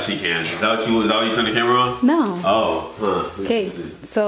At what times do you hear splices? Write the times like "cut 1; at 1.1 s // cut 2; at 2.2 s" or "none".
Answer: none